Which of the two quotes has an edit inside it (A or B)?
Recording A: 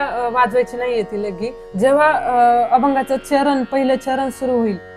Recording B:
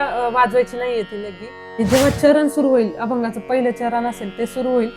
B